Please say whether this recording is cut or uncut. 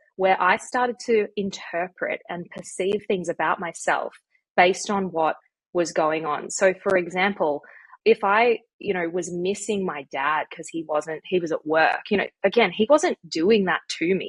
uncut